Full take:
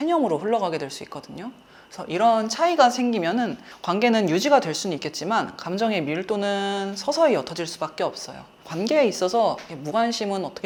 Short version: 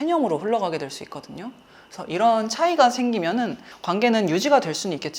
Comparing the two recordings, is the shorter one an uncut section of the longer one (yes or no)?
yes